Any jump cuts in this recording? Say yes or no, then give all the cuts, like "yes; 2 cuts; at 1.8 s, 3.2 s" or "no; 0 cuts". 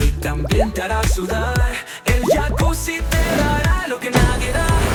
no; 0 cuts